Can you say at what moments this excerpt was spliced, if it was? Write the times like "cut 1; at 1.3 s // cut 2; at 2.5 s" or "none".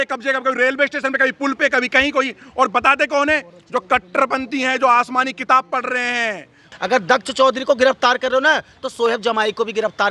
cut 1; at 6.7 s